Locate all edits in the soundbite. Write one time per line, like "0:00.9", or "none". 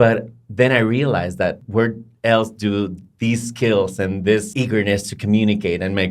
0:01.6
0:04.5

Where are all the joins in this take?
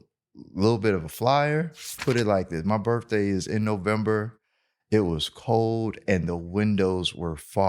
0:02.0

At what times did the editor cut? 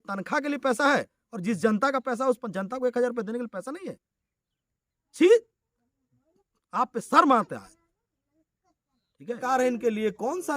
0:09.4

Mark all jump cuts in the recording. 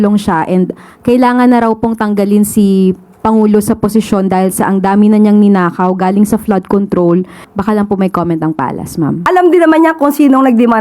0:07.4
0:09.2

